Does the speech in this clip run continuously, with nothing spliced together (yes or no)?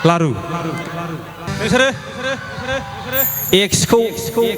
no